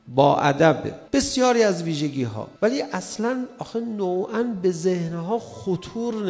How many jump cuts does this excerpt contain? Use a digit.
2